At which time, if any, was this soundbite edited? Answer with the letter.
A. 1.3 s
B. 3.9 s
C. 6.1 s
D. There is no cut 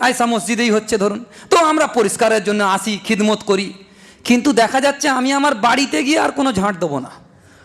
D